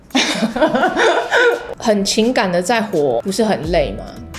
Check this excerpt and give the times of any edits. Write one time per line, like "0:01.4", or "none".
0:01.6
0:03.3